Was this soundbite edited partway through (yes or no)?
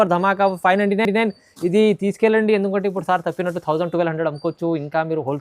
no